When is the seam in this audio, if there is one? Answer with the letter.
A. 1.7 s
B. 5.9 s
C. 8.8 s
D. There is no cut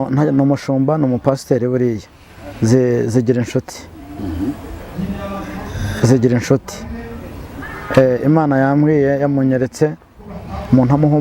D